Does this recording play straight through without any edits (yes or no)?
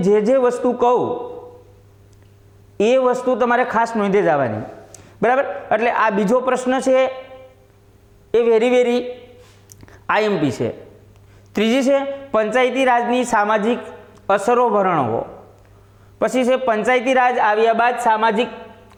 yes